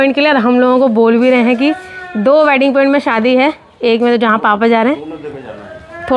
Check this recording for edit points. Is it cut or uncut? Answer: uncut